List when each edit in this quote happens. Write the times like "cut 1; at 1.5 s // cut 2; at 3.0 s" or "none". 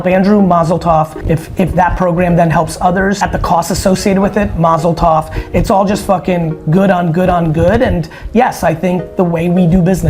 cut 1; at 1.2 s // cut 2; at 3.2 s